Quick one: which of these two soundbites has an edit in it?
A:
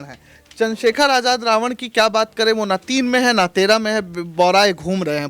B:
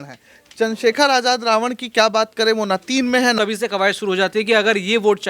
B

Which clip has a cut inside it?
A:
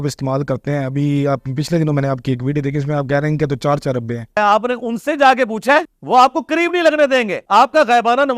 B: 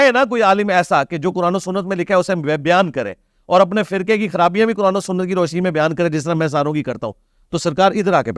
A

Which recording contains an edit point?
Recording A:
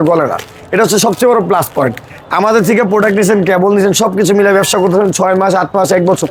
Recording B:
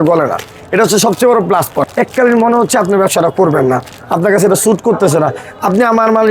B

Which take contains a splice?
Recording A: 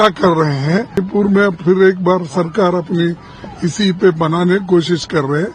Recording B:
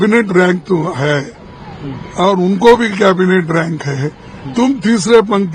A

